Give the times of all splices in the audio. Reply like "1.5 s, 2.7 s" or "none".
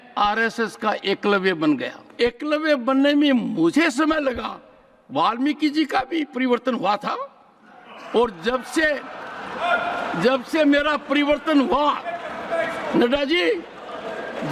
2.1 s